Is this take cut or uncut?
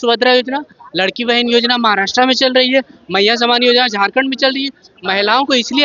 uncut